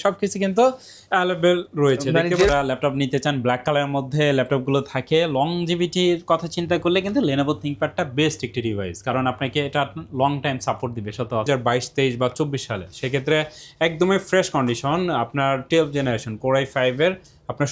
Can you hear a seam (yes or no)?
yes